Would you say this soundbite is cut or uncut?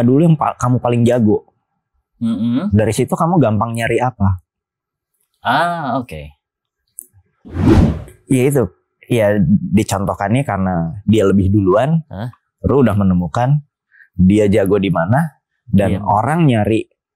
uncut